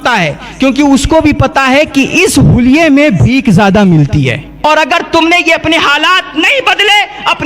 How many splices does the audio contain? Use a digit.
1